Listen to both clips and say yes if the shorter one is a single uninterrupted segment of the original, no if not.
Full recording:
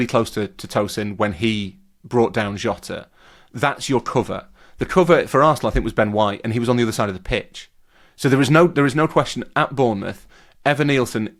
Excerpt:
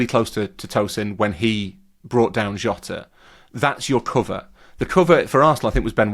yes